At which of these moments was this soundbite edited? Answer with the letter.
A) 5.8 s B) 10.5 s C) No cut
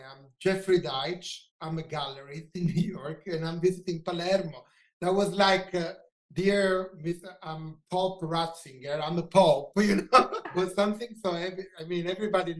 B